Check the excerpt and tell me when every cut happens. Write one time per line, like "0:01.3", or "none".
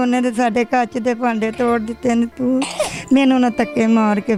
none